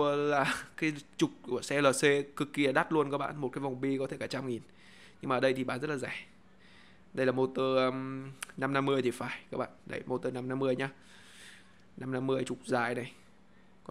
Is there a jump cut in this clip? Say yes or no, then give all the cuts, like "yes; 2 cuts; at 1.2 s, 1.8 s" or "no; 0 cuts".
no; 0 cuts